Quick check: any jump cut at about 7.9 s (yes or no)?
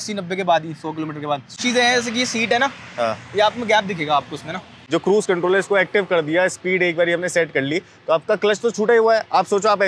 no